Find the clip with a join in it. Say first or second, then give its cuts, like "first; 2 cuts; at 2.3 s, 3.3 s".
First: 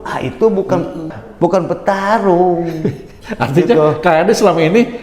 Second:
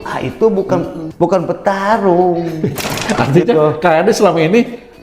second; 1 cut; at 1.0 s